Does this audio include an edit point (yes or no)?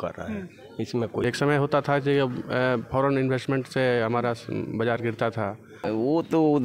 yes